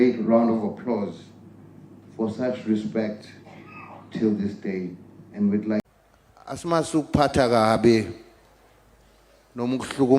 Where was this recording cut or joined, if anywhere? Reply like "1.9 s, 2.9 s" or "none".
5.8 s